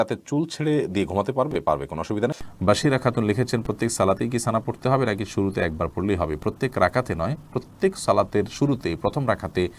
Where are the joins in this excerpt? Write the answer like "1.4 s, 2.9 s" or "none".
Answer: none

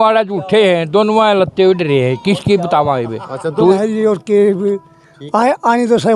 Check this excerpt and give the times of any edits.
3.6 s

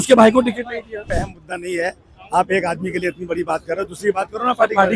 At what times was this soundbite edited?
1.0 s

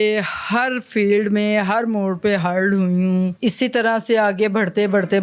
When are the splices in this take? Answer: 3.3 s

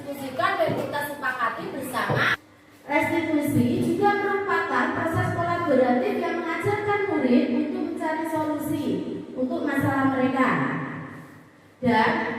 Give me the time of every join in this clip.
2.4 s

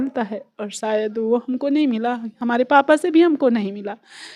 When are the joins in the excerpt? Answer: none

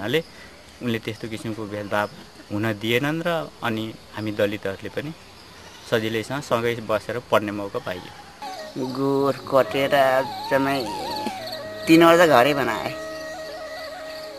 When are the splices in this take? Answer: 8.3 s

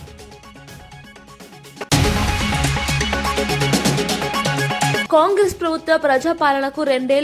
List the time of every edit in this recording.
1.9 s, 5.0 s

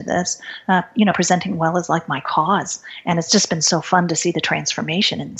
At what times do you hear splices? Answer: none

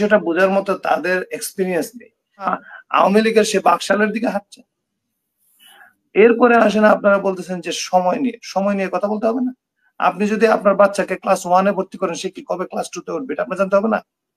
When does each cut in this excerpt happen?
2.5 s

